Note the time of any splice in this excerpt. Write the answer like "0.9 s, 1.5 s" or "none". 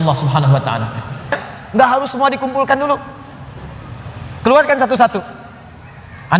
1.4 s